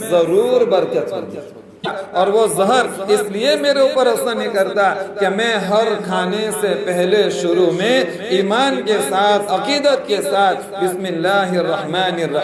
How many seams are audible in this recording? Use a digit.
1